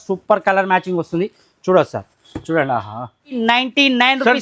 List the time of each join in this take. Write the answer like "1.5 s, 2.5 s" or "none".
3.4 s

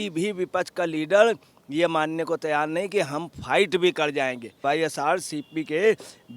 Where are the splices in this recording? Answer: 4.6 s

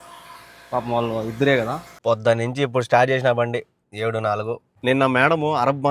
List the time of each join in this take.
1.9 s, 4.7 s

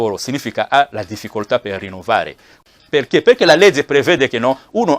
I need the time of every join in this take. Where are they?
2.6 s

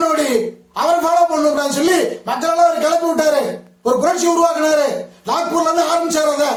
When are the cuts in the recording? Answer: none

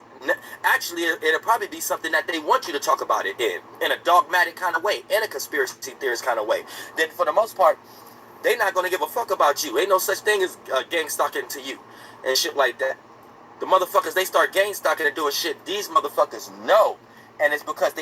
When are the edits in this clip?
1.4 s

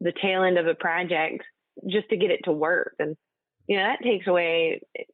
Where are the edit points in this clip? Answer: 2.9 s

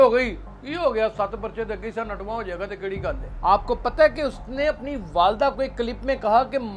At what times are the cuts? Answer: 3.3 s

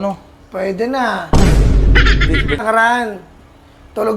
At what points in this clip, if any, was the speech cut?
2.6 s

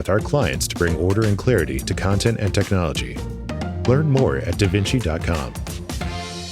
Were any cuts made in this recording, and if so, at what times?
5.5 s

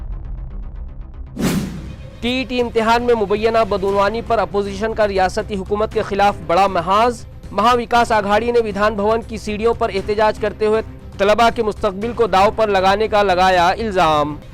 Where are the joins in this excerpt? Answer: 1.6 s

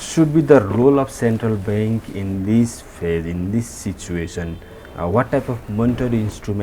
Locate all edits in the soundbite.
none

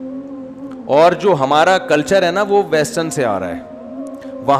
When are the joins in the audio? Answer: none

